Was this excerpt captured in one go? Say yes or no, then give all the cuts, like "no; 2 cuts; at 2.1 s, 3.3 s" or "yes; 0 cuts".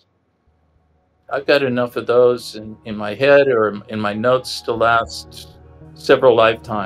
yes; 0 cuts